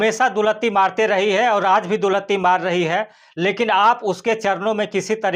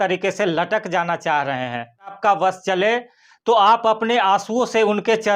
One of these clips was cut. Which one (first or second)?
second